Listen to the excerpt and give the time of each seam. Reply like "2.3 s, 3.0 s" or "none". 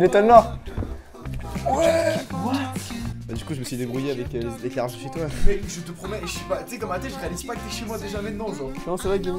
3.2 s